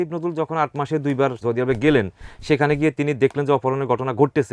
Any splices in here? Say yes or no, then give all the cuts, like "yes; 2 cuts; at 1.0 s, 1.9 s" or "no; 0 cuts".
yes; 1 cut; at 1.4 s